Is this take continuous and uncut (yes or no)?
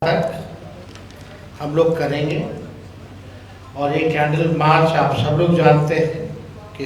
yes